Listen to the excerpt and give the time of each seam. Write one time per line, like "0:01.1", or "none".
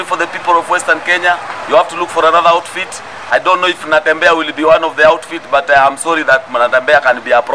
none